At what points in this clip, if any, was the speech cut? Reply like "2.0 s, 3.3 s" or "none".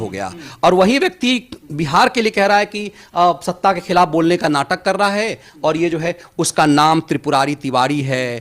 none